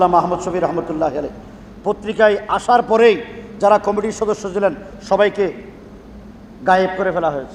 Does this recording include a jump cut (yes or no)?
no